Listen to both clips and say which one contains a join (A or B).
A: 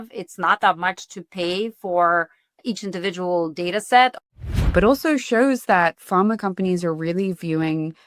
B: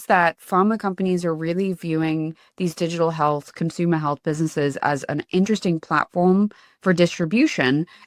A